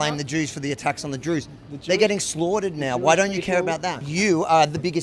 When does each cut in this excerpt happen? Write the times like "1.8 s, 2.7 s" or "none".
4.0 s